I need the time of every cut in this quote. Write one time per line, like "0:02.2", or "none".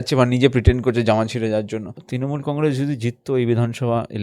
0:02.0